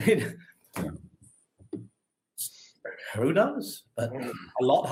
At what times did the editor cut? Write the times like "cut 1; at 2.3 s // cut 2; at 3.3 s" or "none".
none